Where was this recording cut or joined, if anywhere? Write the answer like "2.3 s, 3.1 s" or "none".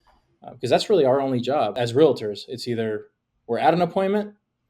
1.8 s